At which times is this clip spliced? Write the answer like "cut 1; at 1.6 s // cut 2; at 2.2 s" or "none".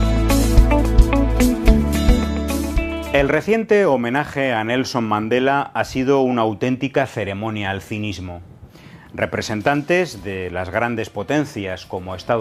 none